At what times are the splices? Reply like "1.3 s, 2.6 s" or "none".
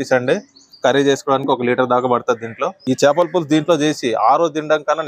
2.7 s